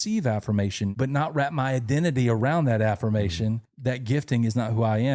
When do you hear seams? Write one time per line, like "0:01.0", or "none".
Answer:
0:00.9
0:03.6